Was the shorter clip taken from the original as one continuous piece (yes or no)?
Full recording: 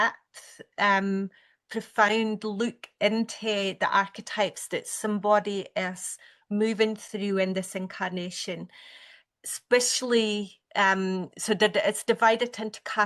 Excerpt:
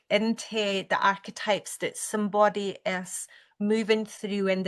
yes